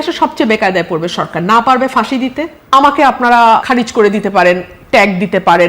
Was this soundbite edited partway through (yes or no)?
yes